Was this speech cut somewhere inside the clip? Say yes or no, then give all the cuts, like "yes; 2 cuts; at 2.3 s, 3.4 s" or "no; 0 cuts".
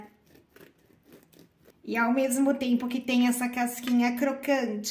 yes; 1 cut; at 1.8 s